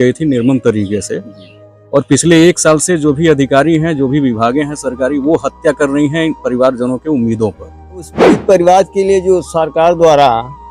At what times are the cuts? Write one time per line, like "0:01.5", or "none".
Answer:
0:08.3